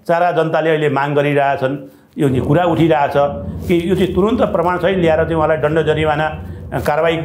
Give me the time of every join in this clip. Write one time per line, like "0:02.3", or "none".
none

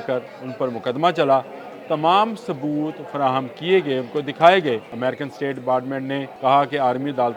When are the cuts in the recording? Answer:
0:04.9
0:06.3

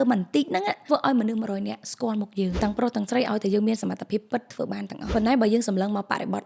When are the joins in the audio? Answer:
0:00.8
0:02.5
0:05.1

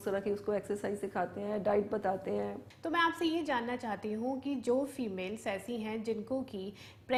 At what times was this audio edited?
none

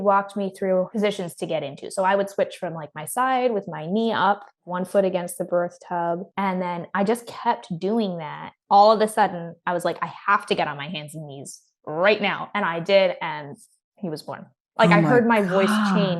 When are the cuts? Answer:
0:00.9

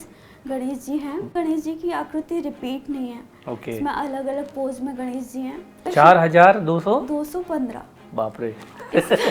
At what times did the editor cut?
0:01.3
0:05.8

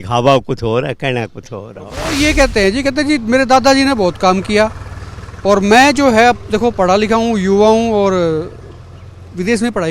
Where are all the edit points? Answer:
0:02.0

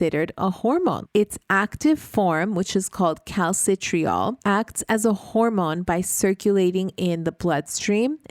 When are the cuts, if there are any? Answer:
0:01.0
0:04.4

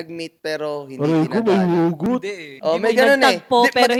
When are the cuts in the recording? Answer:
none

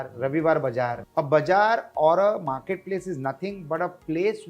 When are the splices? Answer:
0:01.0

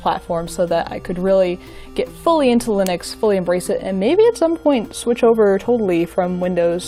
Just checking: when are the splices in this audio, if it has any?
none

